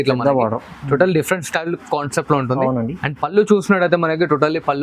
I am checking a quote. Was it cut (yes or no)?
no